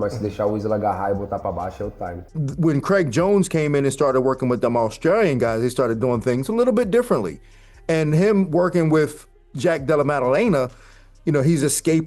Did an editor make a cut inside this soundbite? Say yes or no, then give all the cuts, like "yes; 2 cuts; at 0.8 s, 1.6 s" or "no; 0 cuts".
yes; 1 cut; at 2.3 s